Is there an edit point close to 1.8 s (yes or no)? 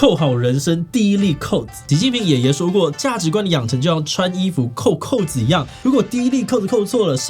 yes